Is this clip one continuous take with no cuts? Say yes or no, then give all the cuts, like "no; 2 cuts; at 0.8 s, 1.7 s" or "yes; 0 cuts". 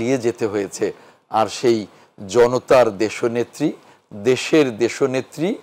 yes; 0 cuts